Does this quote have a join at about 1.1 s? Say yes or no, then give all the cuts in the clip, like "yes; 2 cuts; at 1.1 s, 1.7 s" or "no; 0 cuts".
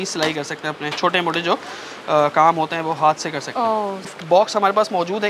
no; 1 cut; at 4.2 s